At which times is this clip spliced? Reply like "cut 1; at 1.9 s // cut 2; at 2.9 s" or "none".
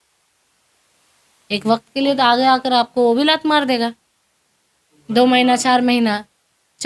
none